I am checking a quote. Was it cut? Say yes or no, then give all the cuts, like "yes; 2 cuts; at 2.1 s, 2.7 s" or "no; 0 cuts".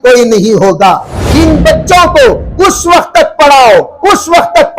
yes; 1 cut; at 1.2 s